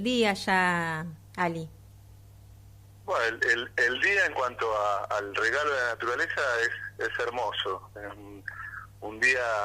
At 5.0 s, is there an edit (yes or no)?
yes